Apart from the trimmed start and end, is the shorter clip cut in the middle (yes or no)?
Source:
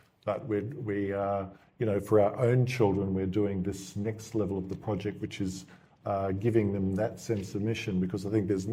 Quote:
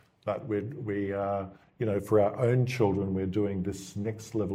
no